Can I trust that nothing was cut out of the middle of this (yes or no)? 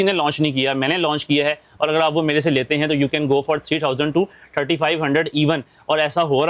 yes